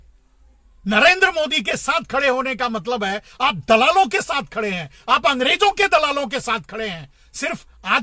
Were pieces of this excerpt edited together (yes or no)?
no